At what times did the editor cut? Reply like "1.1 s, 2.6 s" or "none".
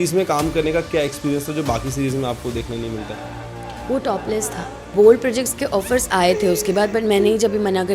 4.9 s

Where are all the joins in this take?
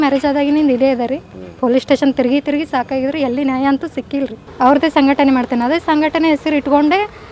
4.4 s

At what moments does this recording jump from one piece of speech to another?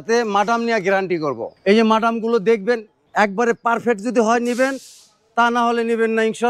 1.5 s, 3.0 s

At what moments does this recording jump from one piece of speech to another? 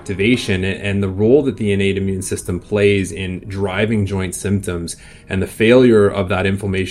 none

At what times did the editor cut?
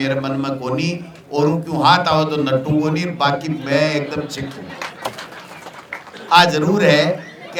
none

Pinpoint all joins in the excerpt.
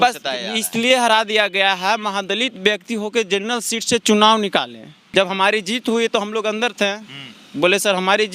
5.1 s

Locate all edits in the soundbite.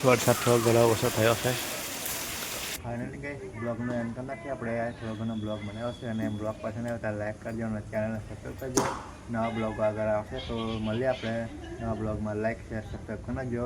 none

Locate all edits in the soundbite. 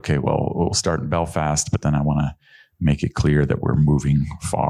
none

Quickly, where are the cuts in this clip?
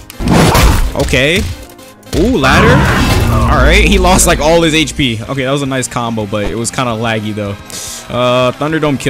none

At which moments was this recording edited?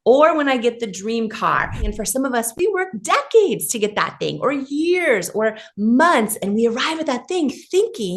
1.8 s

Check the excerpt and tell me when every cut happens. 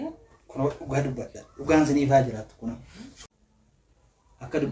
3.1 s

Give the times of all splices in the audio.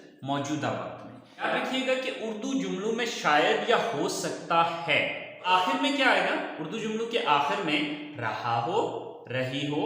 1.5 s, 5.4 s

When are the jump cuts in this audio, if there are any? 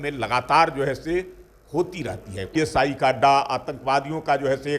2.5 s

